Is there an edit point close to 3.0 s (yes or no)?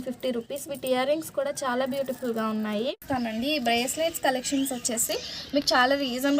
yes